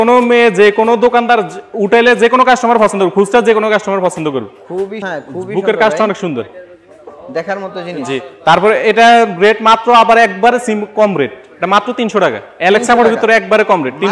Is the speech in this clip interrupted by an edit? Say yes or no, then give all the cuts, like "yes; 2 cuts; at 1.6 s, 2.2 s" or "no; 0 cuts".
yes; 1 cut; at 5.0 s